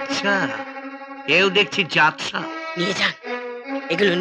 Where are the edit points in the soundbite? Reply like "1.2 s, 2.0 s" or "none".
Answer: none